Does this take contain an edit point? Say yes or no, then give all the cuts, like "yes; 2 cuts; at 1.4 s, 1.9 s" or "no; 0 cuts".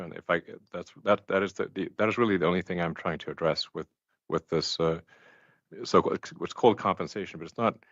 no; 0 cuts